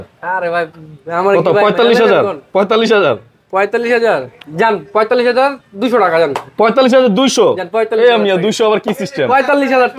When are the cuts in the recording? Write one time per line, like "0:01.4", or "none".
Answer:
none